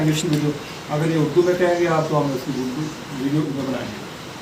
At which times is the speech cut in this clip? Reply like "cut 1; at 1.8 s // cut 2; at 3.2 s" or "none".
cut 1; at 3.5 s